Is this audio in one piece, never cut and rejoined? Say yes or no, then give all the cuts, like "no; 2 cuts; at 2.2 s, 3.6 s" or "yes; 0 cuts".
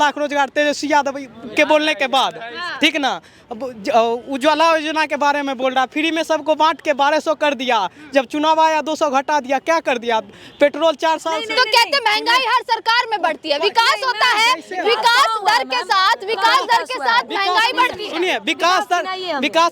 yes; 0 cuts